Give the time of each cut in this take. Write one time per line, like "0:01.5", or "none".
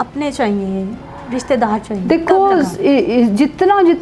none

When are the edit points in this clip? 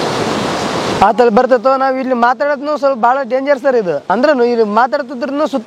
0:00.9
0:04.1

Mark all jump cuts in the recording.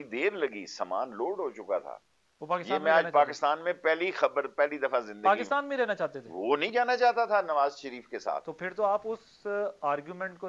none

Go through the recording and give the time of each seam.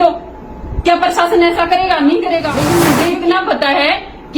0:02.6

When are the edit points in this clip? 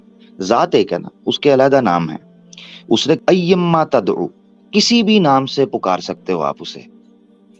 0:03.2

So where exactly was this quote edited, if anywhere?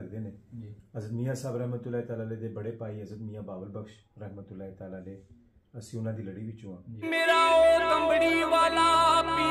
0:07.0

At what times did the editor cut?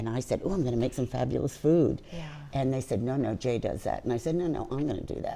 none

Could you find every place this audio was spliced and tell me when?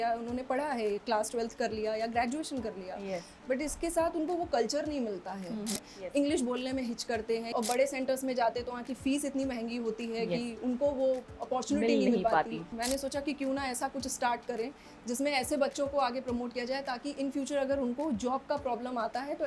0:05.7
0:07.5
0:12.7

